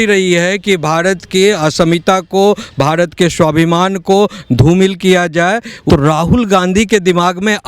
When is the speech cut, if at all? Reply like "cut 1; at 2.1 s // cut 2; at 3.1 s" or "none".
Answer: cut 1; at 5.7 s